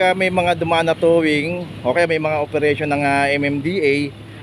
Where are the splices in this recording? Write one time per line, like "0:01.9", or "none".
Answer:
none